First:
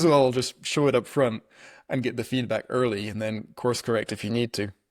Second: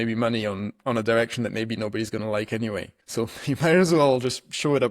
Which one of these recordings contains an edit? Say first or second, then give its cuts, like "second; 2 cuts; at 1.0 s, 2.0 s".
second; 1 cut; at 3.0 s